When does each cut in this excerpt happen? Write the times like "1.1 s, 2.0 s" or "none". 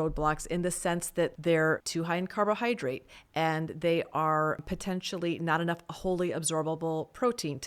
1.4 s, 1.9 s, 4.6 s

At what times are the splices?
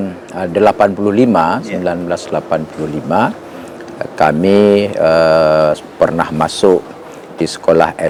none

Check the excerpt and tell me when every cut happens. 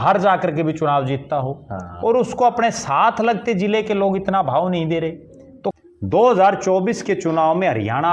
5.8 s

